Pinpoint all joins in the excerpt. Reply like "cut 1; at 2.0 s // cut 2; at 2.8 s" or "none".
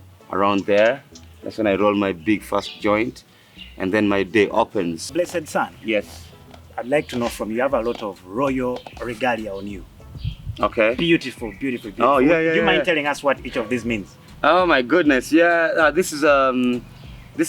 cut 1; at 5.0 s